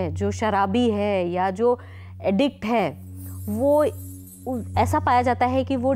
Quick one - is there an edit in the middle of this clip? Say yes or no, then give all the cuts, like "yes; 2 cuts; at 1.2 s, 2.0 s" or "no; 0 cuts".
no; 0 cuts